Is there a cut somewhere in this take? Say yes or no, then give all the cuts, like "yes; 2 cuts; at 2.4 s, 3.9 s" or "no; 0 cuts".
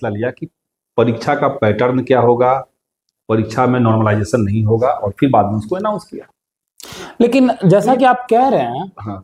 no; 0 cuts